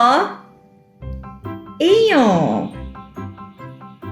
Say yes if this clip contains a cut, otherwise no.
no